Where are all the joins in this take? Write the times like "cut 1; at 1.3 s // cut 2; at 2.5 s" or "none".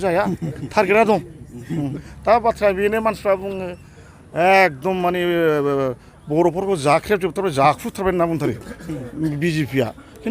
cut 1; at 2.0 s